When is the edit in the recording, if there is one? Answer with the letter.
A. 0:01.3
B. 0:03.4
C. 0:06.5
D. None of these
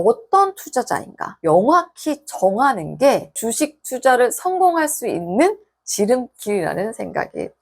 A